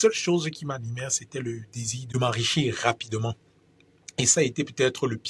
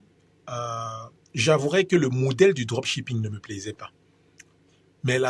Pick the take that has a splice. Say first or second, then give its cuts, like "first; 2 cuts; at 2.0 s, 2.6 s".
first; 1 cut; at 1.9 s